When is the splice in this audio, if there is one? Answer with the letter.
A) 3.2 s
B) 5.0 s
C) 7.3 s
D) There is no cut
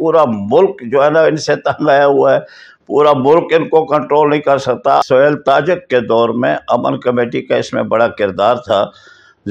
B